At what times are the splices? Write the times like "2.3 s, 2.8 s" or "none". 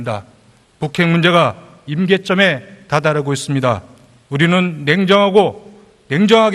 4.6 s